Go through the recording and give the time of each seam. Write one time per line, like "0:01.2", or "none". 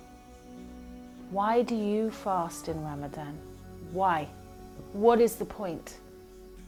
none